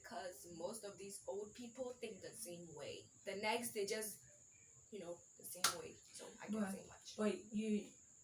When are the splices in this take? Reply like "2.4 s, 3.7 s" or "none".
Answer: 3.1 s